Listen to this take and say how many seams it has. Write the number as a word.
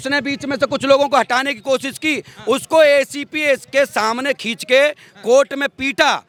zero